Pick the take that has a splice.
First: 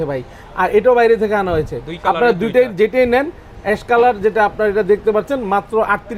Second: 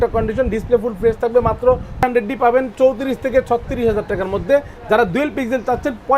second; 1 cut; at 2.0 s

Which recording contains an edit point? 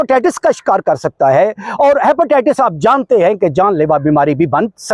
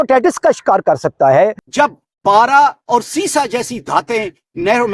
second; 1 cut; at 1.6 s

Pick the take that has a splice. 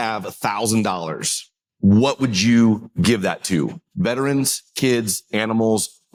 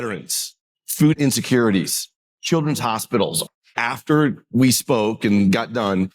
second; 2 cuts; at 1.0 s, 3.5 s

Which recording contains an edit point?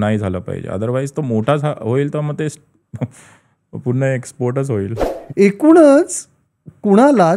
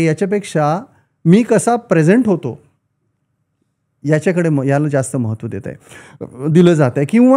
first; 1 cut; at 5.0 s

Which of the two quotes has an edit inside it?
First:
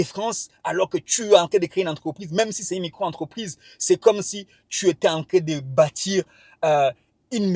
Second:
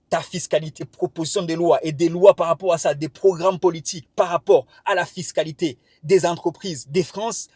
second; 1 cut; at 0.9 s

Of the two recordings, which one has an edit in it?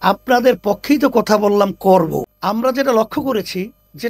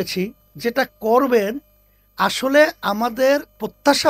first; 1 cut; at 2.3 s

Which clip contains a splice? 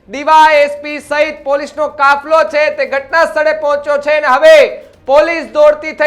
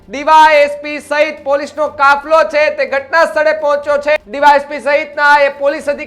second; 1 cut; at 4.2 s

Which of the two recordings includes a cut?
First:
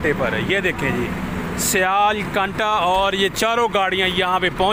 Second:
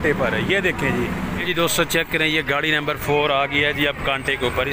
second; 1 cut; at 1.4 s

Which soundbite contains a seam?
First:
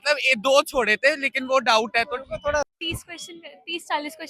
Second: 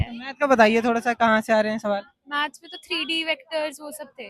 first; 1 cut; at 2.6 s

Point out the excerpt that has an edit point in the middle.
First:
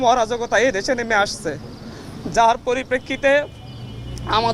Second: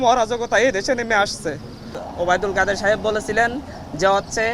second; 1 cut; at 2.0 s

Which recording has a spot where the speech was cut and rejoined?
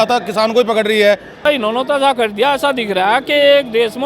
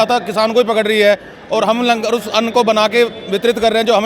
first; 1 cut; at 1.4 s

